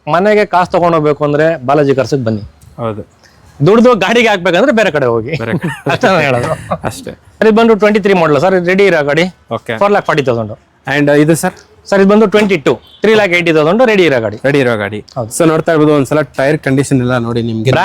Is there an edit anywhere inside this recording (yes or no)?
yes